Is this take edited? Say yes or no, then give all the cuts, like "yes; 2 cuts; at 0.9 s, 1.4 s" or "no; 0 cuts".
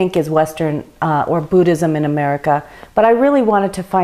no; 0 cuts